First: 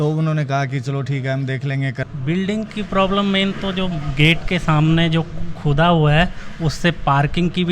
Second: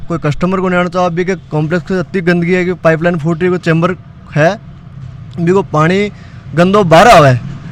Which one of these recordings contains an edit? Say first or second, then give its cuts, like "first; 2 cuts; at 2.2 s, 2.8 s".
first; 1 cut; at 2.0 s